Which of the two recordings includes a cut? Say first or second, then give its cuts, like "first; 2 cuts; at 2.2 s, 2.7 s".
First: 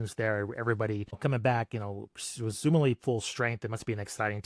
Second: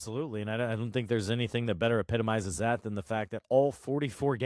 first; 1 cut; at 1.2 s